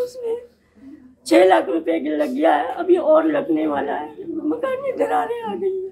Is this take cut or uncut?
uncut